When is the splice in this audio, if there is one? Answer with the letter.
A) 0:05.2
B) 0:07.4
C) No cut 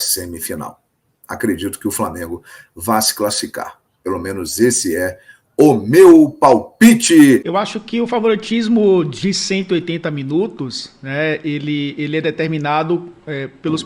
B